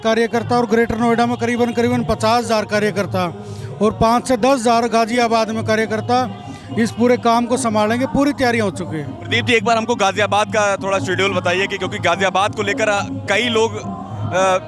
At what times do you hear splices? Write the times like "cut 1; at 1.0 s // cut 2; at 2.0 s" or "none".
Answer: none